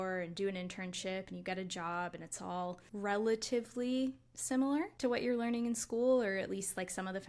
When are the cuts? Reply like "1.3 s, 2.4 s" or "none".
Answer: 2.9 s, 4.9 s